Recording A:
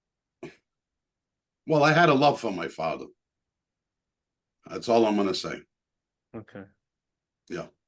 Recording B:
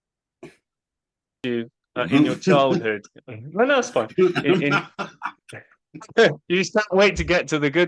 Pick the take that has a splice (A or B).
B